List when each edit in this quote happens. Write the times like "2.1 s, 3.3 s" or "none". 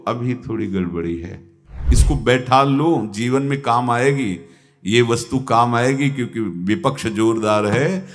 1.9 s